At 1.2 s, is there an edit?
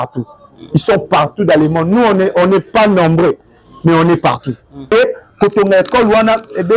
no; 1 cut; at 4.9 s

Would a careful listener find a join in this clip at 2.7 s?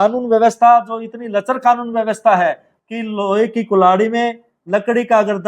yes; 1 cut; at 2.7 s

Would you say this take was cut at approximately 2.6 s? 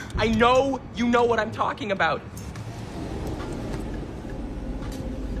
yes; 1 cut; at 2.6 s

